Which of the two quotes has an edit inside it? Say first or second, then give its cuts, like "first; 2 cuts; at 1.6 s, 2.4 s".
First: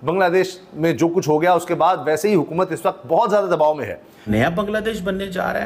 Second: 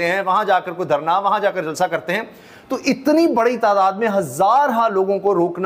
first; 1 cut; at 4.2 s